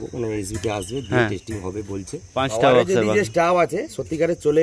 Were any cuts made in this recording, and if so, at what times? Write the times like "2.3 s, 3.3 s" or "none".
2.2 s